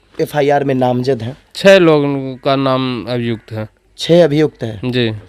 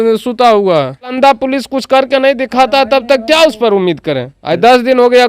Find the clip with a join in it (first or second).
second